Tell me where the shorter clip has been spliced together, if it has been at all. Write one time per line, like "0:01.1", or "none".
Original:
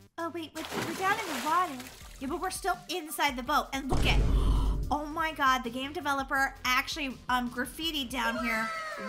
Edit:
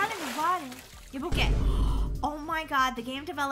0:01.3